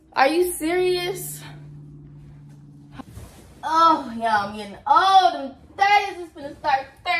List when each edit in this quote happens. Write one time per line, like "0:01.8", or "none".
0:03.0